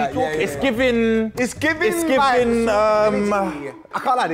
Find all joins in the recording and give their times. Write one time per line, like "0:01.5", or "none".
none